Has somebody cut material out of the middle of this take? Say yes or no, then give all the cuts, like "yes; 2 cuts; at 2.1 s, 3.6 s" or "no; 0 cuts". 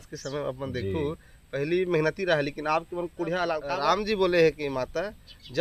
yes; 1 cut; at 3.7 s